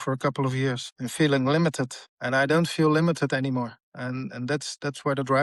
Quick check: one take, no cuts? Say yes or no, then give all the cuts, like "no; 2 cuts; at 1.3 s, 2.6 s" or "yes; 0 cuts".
yes; 0 cuts